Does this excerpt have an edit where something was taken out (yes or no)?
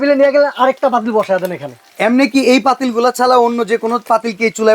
yes